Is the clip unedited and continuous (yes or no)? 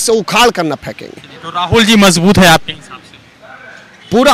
yes